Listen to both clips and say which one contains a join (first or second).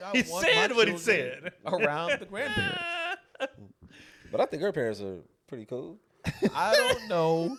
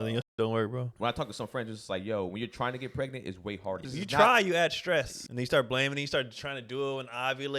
second